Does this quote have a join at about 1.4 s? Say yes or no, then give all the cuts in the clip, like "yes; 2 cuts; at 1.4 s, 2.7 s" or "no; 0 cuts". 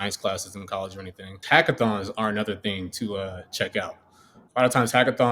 yes; 1 cut; at 1.4 s